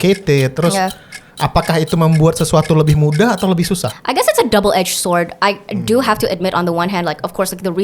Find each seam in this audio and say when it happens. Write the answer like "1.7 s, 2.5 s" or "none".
3.9 s